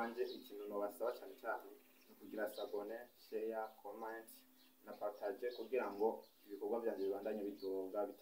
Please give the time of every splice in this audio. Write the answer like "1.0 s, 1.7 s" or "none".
none